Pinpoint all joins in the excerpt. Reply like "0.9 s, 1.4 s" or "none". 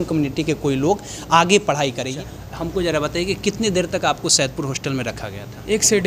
2.1 s